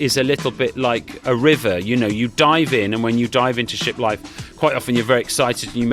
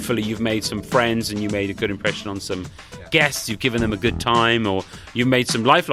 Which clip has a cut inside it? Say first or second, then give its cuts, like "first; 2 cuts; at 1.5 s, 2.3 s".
first; 1 cut; at 1.2 s